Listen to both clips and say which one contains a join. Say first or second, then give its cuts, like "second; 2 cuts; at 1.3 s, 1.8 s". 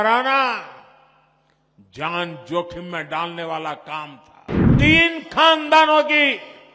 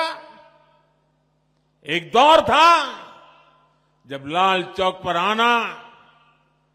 first; 1 cut; at 4.7 s